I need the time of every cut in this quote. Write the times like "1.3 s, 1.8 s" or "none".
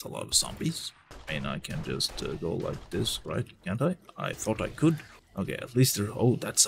none